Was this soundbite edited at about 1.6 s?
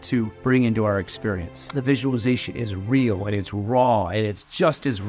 yes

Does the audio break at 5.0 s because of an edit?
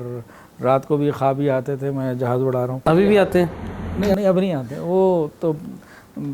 no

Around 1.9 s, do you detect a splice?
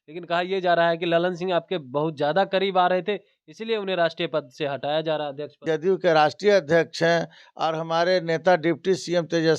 no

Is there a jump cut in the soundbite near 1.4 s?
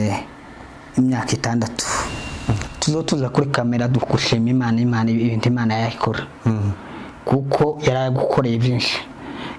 no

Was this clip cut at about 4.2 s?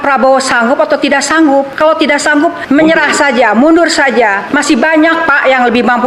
no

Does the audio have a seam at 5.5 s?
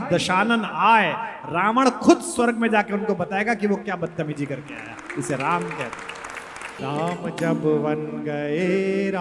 no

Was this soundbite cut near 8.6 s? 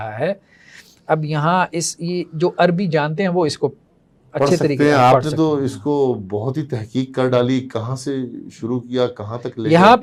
no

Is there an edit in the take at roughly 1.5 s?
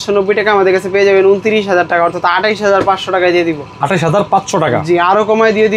no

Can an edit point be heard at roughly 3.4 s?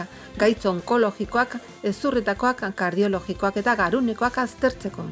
no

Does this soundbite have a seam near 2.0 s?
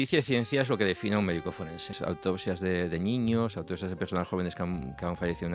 yes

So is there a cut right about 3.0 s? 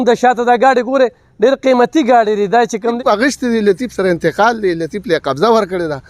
yes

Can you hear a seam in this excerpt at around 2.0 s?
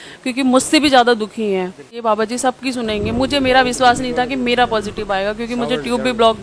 yes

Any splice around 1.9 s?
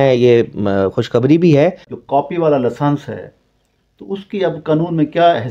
yes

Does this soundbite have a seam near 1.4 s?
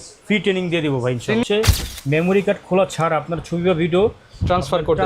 yes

